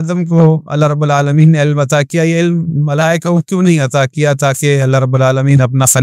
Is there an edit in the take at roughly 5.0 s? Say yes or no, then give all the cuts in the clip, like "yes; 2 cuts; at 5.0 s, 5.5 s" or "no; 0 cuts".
no; 0 cuts